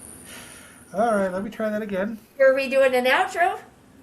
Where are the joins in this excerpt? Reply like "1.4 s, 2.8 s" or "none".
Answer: none